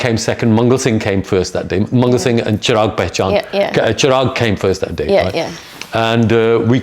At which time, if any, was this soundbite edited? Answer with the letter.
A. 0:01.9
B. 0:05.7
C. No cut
C